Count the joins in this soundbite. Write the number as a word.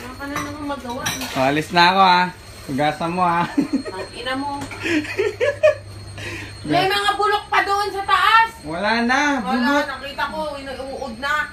one